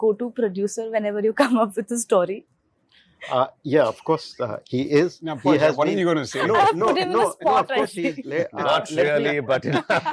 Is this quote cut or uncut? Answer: uncut